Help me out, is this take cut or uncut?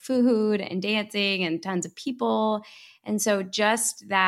uncut